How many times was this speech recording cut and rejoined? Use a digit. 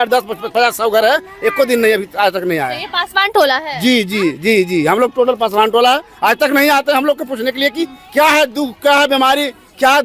0